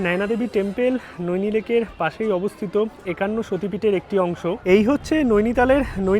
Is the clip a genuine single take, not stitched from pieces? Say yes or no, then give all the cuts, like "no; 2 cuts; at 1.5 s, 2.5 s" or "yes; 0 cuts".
no; 1 cut; at 4.6 s